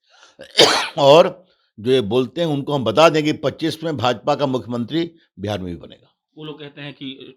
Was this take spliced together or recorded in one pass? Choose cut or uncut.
uncut